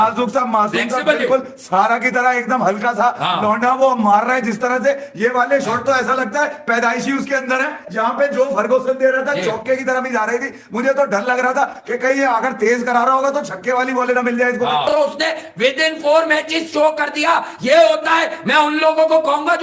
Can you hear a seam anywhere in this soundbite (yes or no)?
no